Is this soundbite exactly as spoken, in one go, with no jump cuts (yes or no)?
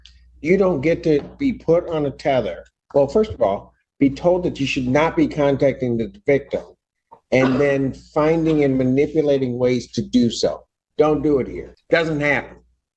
no